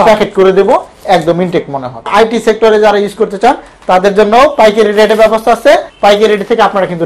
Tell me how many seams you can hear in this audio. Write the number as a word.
two